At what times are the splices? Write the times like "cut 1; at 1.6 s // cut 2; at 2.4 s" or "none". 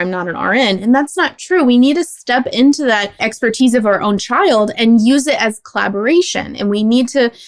none